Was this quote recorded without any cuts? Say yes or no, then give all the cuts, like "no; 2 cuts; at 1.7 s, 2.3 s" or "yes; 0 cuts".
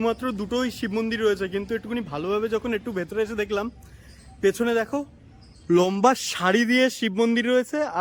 yes; 0 cuts